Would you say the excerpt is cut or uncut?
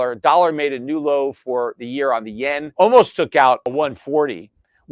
cut